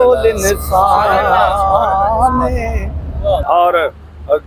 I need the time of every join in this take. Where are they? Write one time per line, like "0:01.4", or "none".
0:03.4